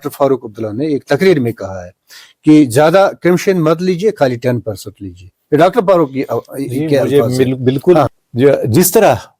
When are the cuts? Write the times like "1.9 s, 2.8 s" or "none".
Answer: 8.1 s